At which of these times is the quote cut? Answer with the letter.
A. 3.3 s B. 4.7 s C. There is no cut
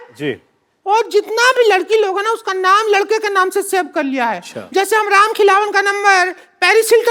C